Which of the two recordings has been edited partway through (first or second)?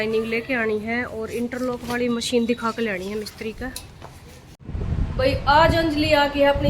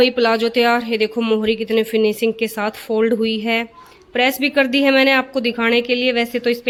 first